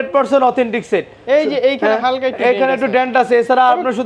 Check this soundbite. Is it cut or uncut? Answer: uncut